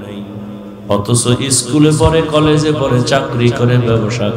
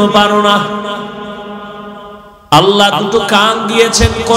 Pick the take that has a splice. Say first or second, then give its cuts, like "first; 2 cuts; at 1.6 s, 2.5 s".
second; 1 cut; at 2.3 s